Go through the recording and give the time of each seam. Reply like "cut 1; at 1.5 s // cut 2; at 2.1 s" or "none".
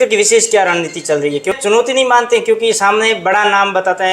cut 1; at 1.6 s